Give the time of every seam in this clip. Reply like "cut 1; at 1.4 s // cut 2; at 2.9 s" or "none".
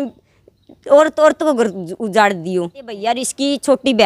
cut 1; at 3.0 s